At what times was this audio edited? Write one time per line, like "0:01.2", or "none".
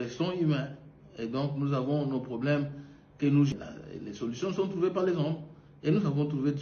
0:03.5